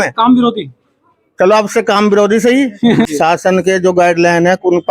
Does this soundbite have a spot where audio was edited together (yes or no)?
yes